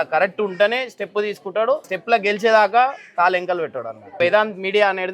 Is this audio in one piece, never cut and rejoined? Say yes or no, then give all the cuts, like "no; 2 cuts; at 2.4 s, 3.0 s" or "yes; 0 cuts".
no; 2 cuts; at 1.9 s, 4.2 s